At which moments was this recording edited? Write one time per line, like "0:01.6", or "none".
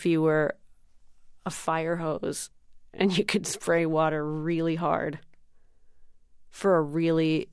0:01.3